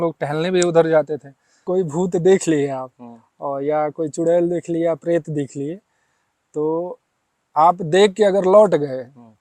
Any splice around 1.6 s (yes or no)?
yes